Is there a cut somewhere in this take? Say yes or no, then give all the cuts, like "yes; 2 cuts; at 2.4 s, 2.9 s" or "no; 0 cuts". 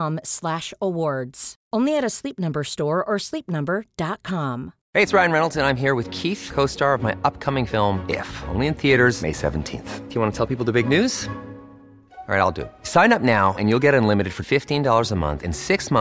yes; 1 cut; at 4.8 s